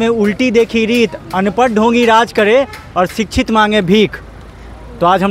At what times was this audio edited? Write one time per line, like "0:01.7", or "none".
none